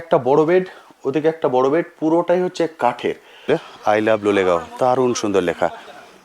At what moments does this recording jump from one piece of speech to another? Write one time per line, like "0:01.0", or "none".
0:03.5